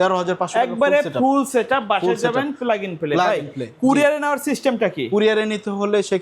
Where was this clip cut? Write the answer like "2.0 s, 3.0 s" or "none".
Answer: none